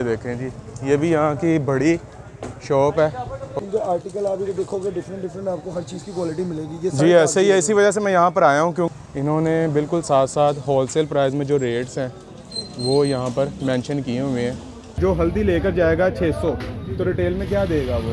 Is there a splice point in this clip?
yes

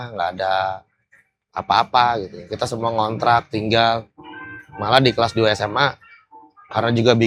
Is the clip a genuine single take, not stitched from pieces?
yes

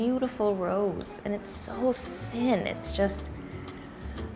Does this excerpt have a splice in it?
no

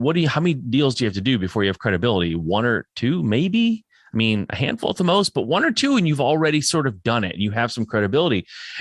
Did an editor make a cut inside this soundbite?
no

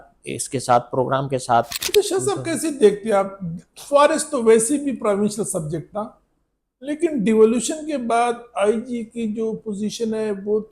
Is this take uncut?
no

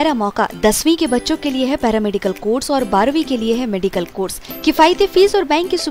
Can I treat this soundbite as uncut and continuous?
yes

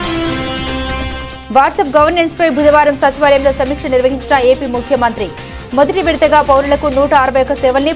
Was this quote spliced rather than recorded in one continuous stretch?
yes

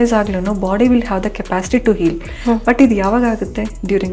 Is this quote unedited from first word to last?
yes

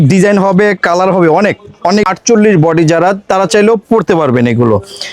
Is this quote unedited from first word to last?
no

